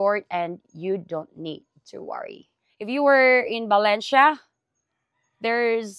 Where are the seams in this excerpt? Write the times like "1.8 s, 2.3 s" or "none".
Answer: 2.4 s